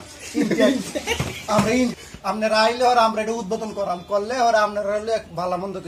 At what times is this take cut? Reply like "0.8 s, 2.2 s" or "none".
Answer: 1.9 s